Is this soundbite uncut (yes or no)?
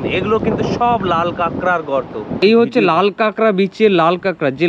no